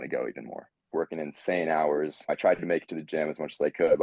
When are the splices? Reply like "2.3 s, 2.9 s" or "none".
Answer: 0.9 s, 2.3 s